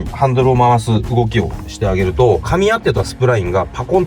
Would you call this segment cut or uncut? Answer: uncut